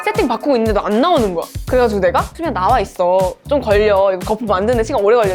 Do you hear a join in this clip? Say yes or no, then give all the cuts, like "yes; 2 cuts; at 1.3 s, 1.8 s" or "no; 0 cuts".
no; 0 cuts